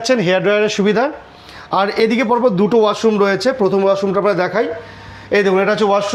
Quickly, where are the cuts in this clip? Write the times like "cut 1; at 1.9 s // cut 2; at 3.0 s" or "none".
none